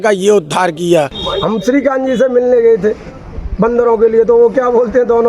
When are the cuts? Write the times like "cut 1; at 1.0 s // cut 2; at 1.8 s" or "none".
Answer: cut 1; at 1.2 s